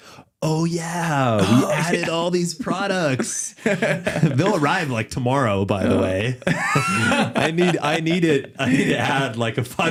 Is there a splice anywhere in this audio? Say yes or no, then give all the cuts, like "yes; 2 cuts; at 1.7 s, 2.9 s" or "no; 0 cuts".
no; 0 cuts